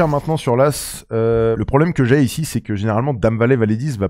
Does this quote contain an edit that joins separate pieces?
no; 0 cuts

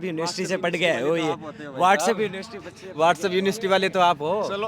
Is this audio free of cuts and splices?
yes; 0 cuts

